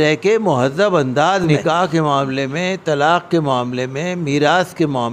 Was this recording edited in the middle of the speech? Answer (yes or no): yes